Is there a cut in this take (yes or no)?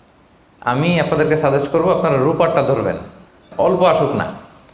yes